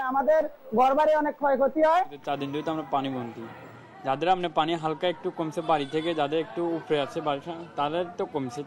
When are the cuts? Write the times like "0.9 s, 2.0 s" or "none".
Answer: 2.1 s